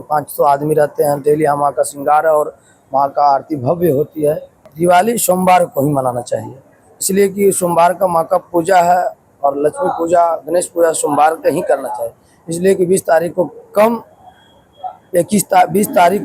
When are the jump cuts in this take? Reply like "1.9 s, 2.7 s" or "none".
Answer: 4.6 s